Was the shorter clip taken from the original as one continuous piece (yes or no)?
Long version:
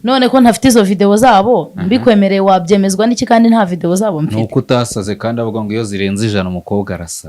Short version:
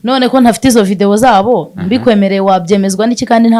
yes